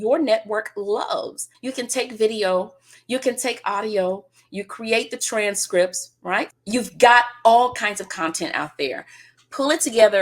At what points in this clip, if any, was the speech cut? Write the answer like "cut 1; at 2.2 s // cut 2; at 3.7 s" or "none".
cut 1; at 1.6 s // cut 2; at 6.5 s